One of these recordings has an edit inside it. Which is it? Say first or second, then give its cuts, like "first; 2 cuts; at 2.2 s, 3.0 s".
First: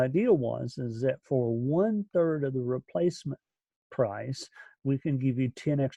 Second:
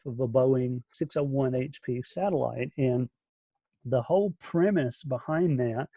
second; 1 cut; at 0.9 s